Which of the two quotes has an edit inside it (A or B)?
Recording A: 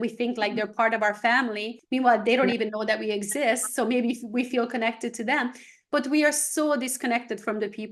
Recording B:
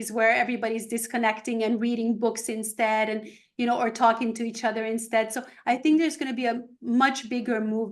A